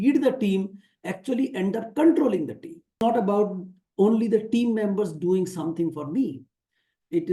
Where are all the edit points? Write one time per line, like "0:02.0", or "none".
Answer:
0:03.0